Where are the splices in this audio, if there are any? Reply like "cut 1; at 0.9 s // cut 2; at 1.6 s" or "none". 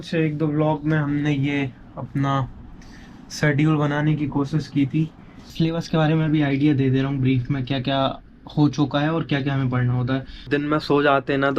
cut 1; at 5.5 s // cut 2; at 10.5 s

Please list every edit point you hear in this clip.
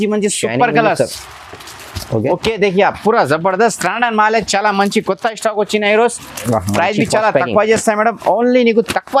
none

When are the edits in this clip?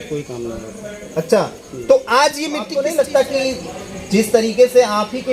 cut 1; at 2.7 s

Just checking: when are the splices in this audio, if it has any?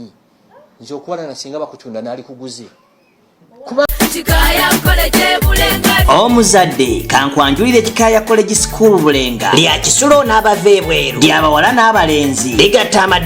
cut 1; at 3.9 s

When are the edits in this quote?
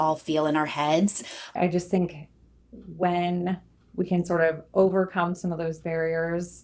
cut 1; at 1.5 s

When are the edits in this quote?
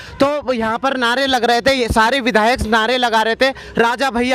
none

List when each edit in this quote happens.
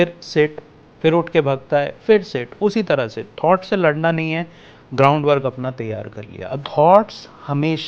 cut 1; at 6.6 s

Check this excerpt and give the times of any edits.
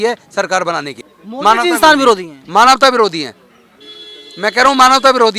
cut 1; at 1.0 s

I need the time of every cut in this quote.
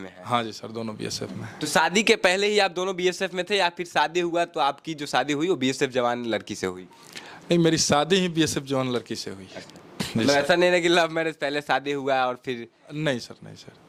none

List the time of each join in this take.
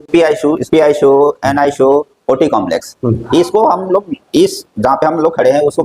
none

